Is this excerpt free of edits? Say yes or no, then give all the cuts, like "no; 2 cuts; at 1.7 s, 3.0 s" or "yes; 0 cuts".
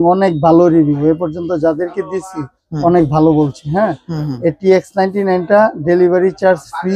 yes; 0 cuts